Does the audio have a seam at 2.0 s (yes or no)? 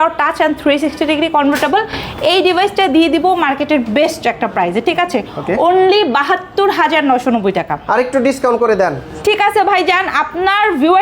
no